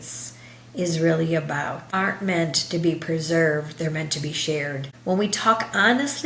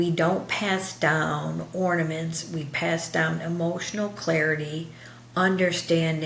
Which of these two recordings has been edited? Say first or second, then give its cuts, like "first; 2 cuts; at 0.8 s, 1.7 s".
first; 2 cuts; at 1.8 s, 4.9 s